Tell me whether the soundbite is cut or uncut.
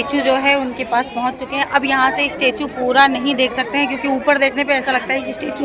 uncut